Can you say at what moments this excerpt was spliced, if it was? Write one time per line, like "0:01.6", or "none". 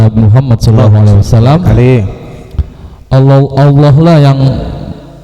none